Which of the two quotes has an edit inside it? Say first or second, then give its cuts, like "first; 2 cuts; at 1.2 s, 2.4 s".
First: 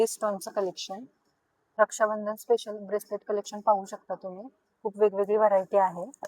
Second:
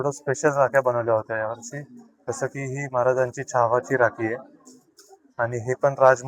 first; 1 cut; at 1.8 s